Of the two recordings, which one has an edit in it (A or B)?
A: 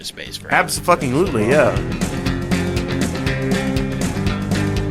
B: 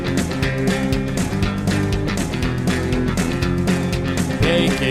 A